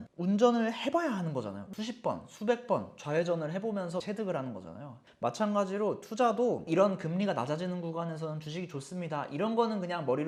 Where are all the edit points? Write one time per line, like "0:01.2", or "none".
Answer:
none

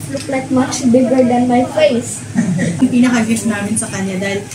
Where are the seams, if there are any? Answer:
0:02.8

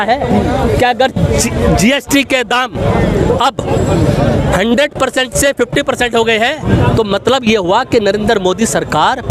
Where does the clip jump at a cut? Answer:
none

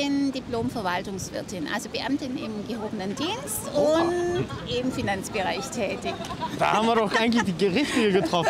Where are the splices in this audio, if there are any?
none

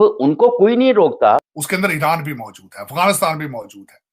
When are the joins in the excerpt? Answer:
0:01.6

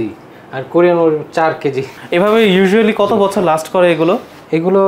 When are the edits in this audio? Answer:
0:01.9

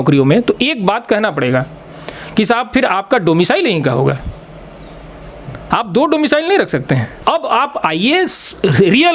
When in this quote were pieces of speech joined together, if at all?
0:07.1

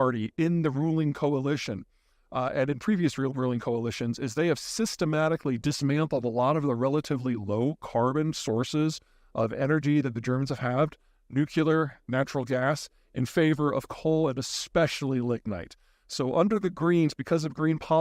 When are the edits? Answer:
none

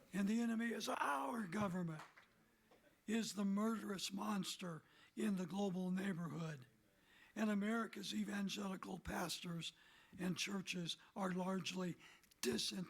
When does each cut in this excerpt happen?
0:00.9

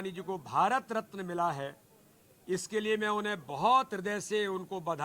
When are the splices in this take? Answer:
none

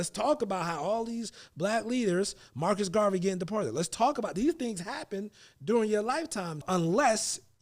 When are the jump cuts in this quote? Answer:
0:06.6

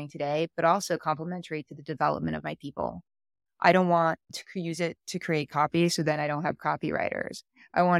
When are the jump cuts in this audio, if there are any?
0:04.4

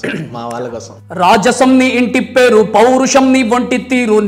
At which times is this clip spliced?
0:01.0

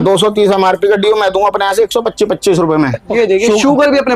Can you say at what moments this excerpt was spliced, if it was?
0:03.0

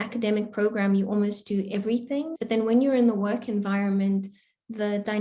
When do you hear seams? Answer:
0:02.3

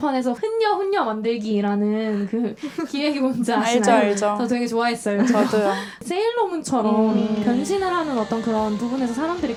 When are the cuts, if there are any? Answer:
none

